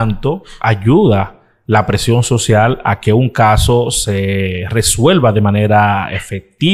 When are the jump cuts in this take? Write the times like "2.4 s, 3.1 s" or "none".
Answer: none